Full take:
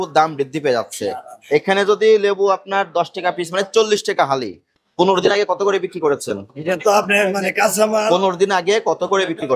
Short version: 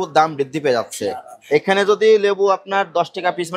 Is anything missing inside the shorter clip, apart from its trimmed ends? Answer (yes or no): no